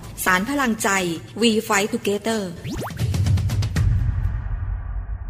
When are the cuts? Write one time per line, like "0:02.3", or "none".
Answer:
none

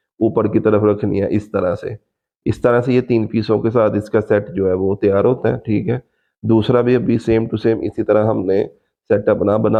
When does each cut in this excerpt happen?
none

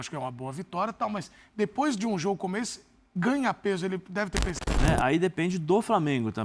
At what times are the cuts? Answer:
0:04.6

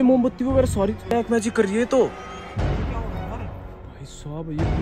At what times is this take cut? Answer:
none

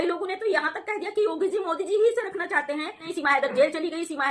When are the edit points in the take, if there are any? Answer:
0:03.1

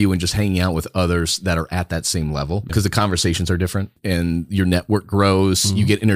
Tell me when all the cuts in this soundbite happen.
0:02.7
0:04.0

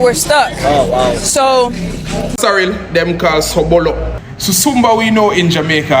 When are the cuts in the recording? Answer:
0:02.3

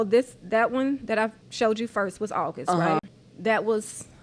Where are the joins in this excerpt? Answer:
0:01.4
0:03.2

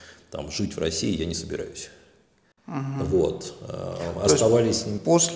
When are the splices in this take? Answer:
none

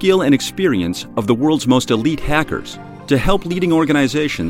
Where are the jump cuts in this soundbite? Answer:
none

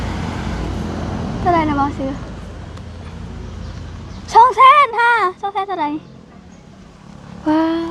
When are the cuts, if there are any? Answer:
none

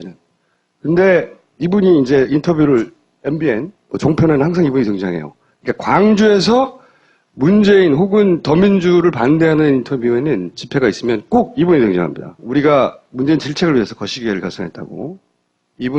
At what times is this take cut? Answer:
none

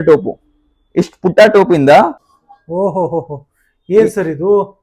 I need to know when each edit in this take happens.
0:02.2

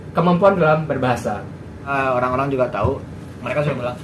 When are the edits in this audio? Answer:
0:01.9

